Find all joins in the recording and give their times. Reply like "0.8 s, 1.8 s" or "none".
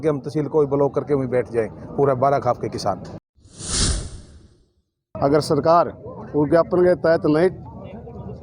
3.2 s, 5.0 s

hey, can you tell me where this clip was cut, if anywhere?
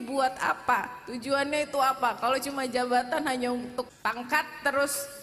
3.9 s

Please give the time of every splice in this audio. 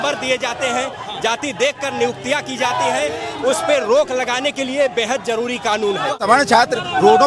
6.2 s

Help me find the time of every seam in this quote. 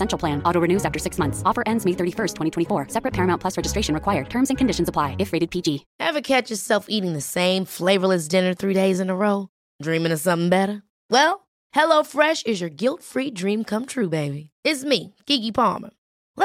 5.9 s

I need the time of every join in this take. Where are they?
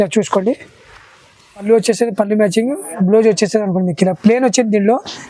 1.6 s

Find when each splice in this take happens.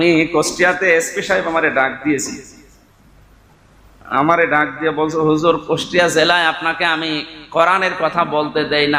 none

